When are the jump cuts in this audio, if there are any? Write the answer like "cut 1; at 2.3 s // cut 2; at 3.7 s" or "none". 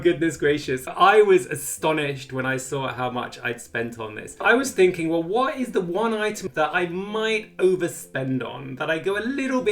cut 1; at 0.9 s // cut 2; at 4.4 s // cut 3; at 6.4 s